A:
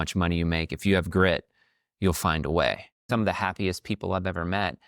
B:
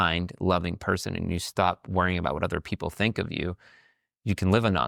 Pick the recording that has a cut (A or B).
A